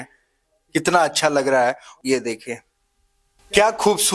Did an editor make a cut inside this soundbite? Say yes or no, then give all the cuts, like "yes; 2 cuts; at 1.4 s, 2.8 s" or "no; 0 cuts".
no; 0 cuts